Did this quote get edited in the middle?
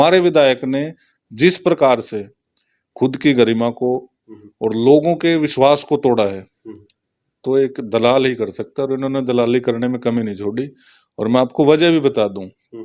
no; 0 cuts

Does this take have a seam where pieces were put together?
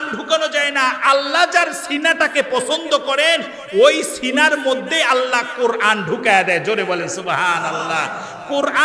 no; 0 cuts

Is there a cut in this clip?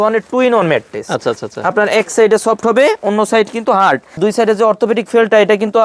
yes; 1 cut; at 4.2 s

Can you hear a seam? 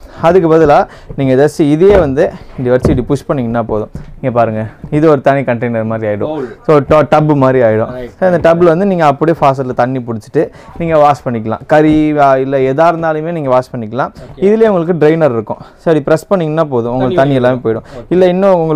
no; 0 cuts

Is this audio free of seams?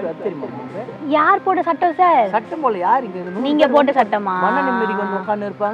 yes; 0 cuts

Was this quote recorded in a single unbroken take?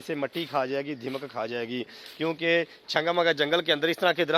yes; 0 cuts

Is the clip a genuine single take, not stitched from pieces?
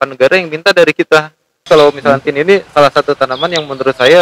no; 1 cut; at 1.7 s

